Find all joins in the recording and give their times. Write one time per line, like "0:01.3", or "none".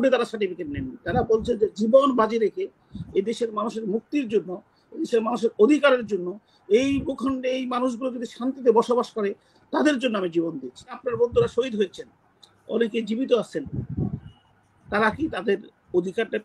0:11.0